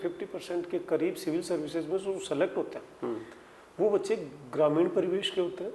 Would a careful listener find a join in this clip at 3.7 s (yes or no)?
no